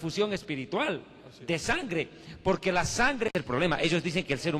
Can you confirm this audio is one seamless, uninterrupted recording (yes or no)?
yes